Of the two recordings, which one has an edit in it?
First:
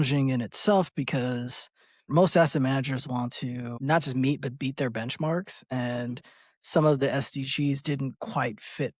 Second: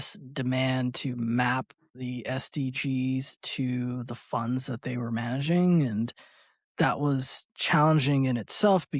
first; 2 cuts; at 2.1 s, 3.7 s

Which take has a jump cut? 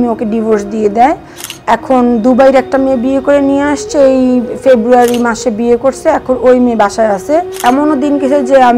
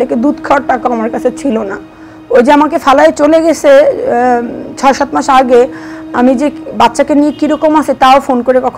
first; 1 cut; at 7.6 s

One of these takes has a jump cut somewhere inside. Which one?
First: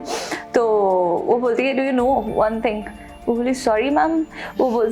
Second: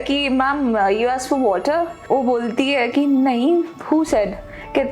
second; 1 cut; at 2.0 s

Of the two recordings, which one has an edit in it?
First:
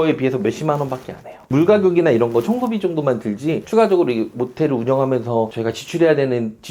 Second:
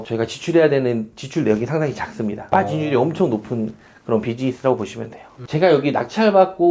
second; 1 cut; at 5.4 s

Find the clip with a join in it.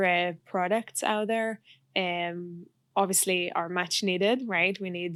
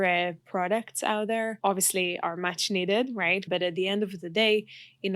second; 2 cuts; at 1.6 s, 3.5 s

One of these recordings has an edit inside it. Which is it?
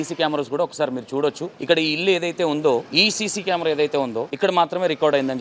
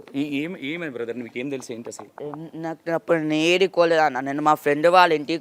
first; 3 cuts; at 1.5 s, 2.9 s, 4.3 s

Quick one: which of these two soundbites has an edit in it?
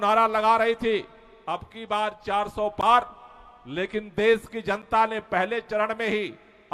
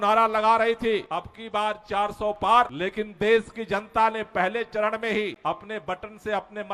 second; 3 cuts; at 1.1 s, 2.8 s, 5.4 s

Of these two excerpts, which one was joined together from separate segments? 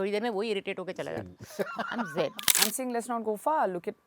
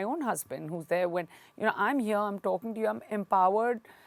first; 1 cut; at 2.5 s

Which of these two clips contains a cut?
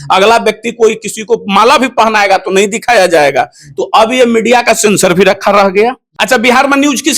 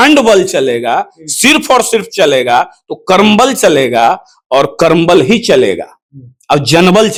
first; 1 cut; at 6.1 s

